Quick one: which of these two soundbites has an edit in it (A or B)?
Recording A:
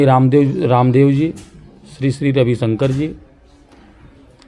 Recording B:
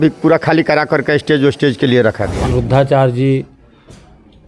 B